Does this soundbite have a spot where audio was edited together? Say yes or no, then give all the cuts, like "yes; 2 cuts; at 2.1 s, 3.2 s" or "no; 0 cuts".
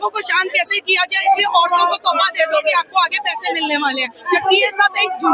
no; 0 cuts